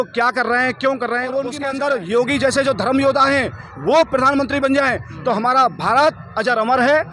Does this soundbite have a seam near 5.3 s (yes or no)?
no